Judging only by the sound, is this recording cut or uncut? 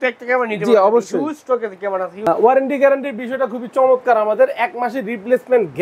cut